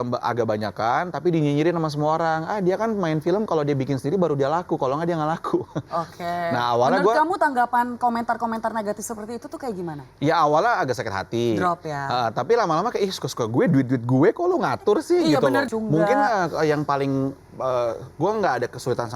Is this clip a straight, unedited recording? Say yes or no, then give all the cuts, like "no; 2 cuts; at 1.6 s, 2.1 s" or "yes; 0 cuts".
no; 1 cut; at 15.7 s